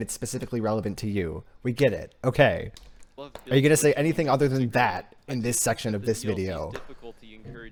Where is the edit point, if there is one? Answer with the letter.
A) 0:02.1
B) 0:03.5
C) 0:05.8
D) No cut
D